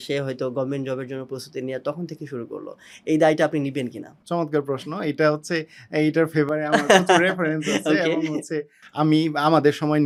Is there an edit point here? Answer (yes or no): no